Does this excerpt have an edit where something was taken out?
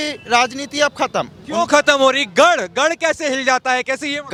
no; 0 cuts

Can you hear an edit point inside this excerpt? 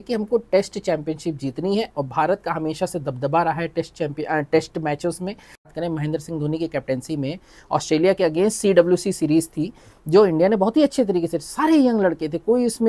yes; 1 cut; at 5.5 s

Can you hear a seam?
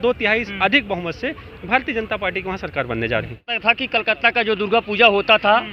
yes; 1 cut; at 3.5 s

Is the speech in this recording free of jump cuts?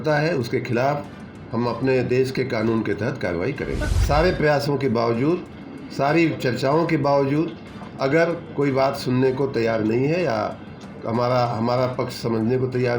no; 1 cut; at 3.8 s

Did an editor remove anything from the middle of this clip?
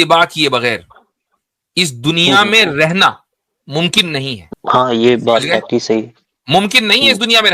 yes; 1 cut; at 4.4 s

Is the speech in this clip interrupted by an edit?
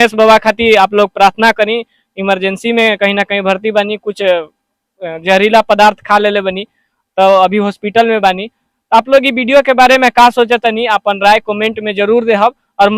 no; 0 cuts

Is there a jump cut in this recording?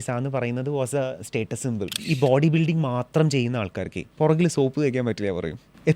yes; 1 cut; at 1.9 s

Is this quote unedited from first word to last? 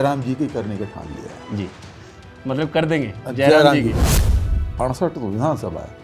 no; 1 cut; at 4.2 s

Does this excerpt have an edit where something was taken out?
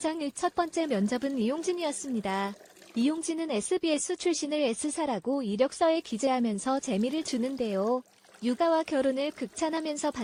no; 0 cuts

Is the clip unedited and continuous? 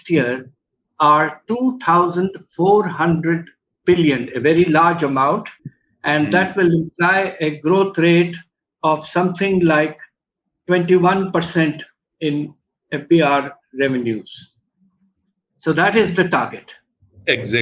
yes; 0 cuts

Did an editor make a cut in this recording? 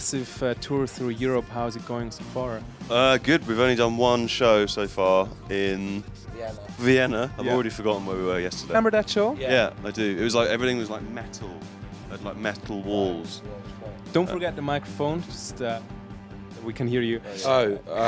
no; 0 cuts

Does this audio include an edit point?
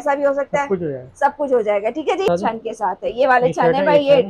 yes; 1 cut; at 2.3 s

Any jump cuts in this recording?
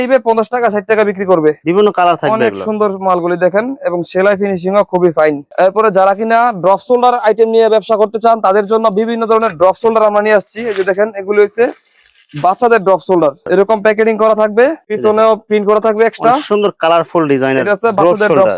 no; 0 cuts

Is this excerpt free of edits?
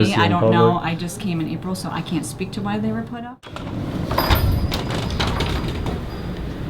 no; 1 cut; at 3.7 s

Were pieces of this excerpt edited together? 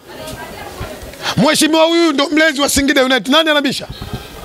no; 0 cuts

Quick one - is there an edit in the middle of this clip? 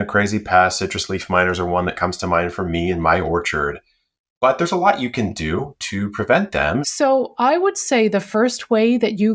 yes; 1 cut; at 6.9 s

